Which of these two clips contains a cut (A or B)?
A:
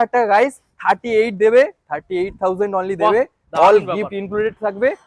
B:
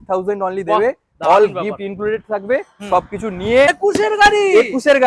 B